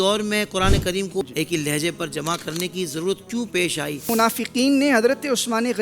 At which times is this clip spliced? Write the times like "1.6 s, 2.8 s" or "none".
1.2 s, 4.1 s